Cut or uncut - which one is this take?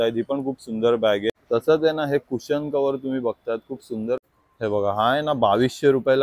cut